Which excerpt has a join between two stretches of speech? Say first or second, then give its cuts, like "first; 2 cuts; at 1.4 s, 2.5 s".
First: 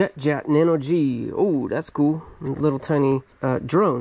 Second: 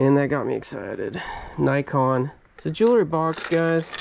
second; 1 cut; at 2.5 s